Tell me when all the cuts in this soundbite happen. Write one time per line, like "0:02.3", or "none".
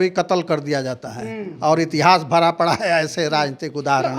none